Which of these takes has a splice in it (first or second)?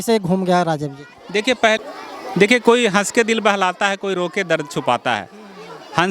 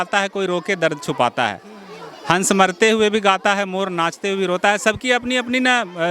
first